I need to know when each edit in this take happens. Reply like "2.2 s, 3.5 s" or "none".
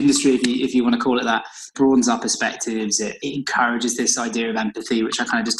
none